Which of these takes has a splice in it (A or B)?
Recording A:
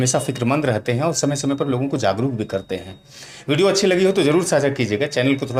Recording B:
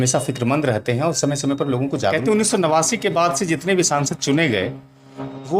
B